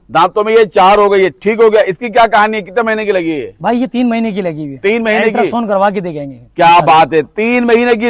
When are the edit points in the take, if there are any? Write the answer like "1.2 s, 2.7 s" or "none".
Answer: none